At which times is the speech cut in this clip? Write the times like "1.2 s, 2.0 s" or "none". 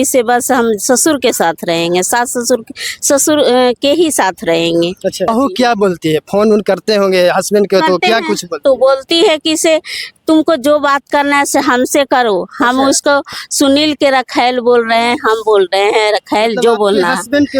5.3 s